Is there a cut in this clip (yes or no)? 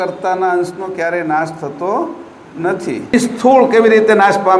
yes